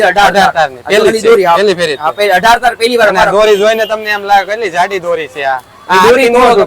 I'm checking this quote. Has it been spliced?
no; 0 cuts

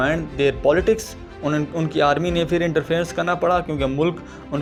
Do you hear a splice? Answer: no; 0 cuts

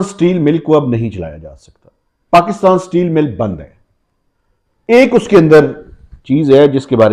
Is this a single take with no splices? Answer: yes; 0 cuts

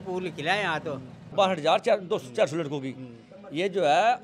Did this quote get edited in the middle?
yes; 1 cut; at 1.3 s

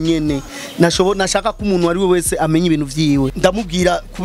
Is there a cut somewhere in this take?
yes; 1 cut; at 3.3 s

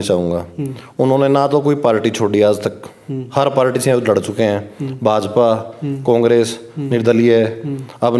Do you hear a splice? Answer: no; 0 cuts

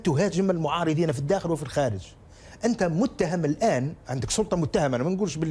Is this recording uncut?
yes; 0 cuts

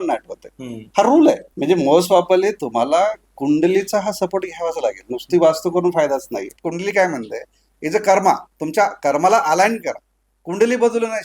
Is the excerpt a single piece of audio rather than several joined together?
no; 2 cuts; at 1.5 s, 6.5 s

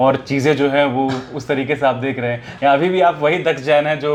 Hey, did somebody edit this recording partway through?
no; 0 cuts

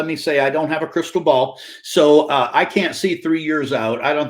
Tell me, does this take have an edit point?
no; 0 cuts

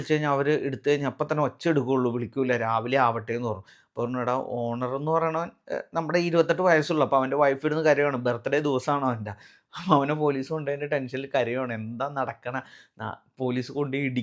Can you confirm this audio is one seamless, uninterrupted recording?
yes; 0 cuts

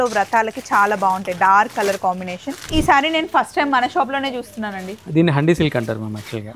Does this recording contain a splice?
yes; 1 cut; at 2.7 s

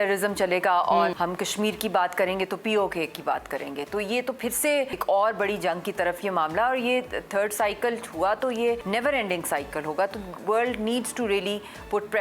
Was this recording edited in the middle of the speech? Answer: yes; 3 cuts; at 1.1 s, 5.0 s, 8.8 s

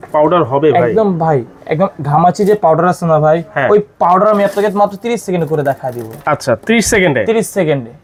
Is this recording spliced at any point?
no; 0 cuts

